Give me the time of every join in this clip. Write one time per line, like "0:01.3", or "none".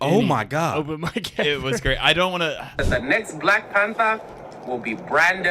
0:02.8